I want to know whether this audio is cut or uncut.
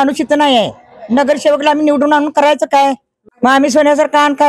uncut